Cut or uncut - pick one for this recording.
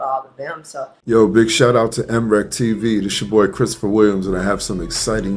cut